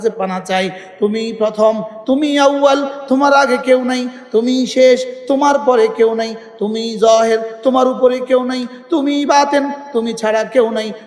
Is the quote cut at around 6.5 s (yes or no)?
no